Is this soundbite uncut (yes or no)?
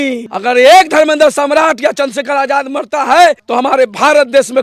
yes